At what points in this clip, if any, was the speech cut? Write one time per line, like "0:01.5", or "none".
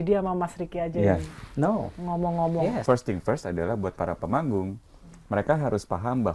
0:02.8